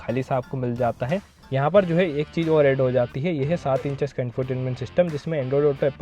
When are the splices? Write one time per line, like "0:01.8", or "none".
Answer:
0:01.4